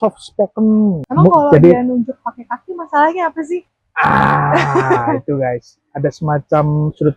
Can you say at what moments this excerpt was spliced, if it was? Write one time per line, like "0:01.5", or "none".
0:01.0

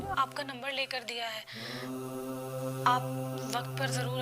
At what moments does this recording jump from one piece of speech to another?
none

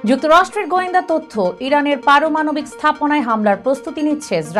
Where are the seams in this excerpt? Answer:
none

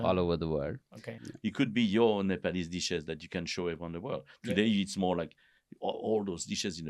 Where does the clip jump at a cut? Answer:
0:01.2

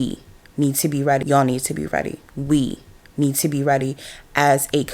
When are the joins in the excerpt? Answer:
none

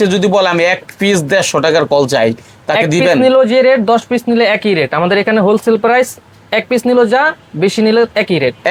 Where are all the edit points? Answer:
none

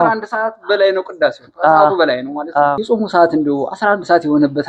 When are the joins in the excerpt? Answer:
0:02.8

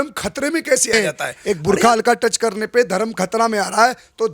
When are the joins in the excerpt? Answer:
0:00.9

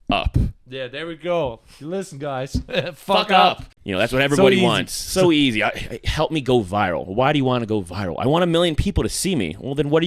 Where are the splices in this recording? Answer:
0:03.7

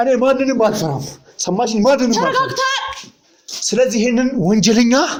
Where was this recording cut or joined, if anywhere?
none

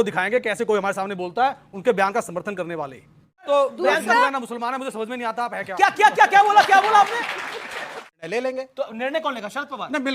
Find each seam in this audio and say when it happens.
0:03.5
0:08.0

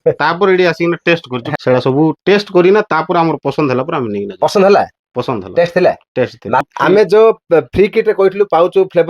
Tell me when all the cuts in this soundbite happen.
0:01.5
0:06.7

